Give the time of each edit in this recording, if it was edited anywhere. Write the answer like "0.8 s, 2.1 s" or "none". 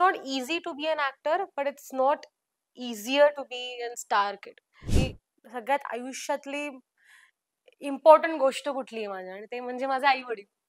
4.9 s